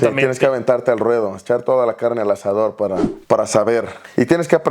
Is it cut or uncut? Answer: cut